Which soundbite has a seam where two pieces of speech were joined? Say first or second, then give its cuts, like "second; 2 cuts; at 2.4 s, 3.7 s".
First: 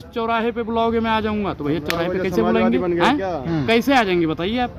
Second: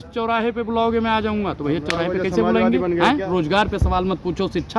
second; 1 cut; at 3.3 s